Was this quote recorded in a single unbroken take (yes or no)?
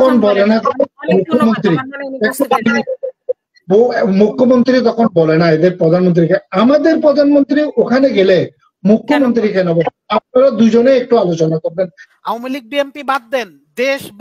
no